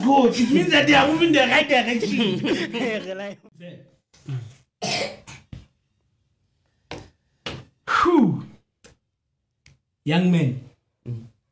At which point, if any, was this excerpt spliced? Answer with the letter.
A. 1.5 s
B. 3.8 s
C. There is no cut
B